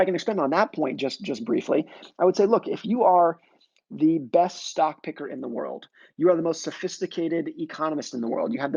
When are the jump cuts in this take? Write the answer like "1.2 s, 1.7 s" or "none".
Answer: none